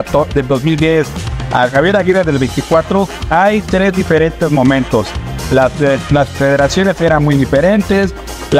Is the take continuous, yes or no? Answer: yes